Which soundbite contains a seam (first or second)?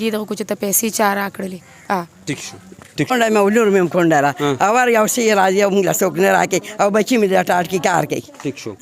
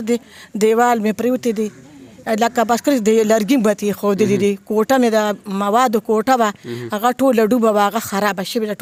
first